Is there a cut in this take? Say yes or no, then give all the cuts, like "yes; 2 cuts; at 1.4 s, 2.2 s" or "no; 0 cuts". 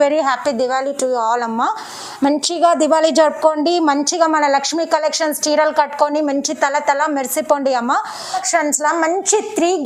yes; 1 cut; at 8.4 s